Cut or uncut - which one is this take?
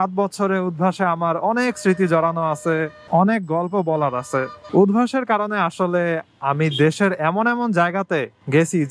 cut